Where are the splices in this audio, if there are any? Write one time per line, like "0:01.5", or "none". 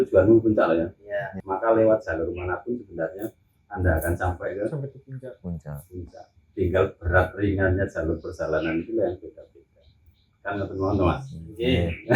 0:01.4